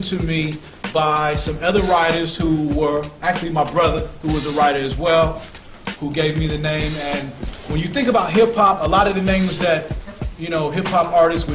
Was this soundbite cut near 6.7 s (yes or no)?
no